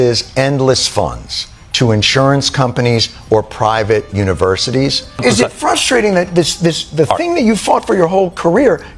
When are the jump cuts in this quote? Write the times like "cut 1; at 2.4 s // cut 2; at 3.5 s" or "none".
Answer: cut 1; at 5.2 s

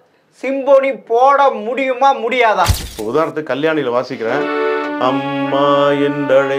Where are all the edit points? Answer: cut 1; at 2.9 s

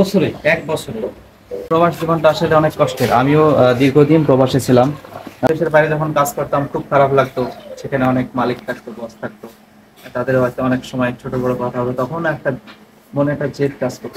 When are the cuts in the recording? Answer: cut 1; at 1.7 s // cut 2; at 5.5 s

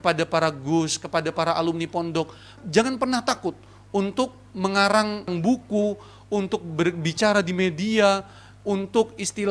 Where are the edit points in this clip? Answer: cut 1; at 2.6 s // cut 2; at 5.3 s

